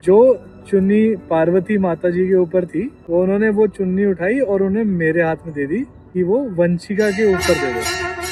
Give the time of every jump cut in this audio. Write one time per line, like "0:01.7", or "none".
0:03.0
0:06.0